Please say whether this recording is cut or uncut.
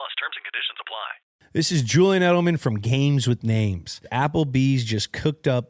cut